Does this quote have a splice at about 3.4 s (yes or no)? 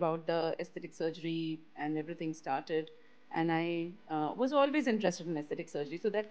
no